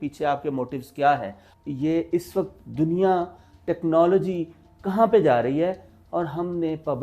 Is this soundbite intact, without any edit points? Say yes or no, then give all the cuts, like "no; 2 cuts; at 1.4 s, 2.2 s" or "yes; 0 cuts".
no; 1 cut; at 1.5 s